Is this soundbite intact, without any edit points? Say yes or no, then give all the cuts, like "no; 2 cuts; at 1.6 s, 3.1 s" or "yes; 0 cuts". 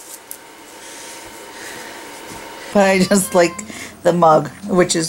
no; 1 cut; at 2.6 s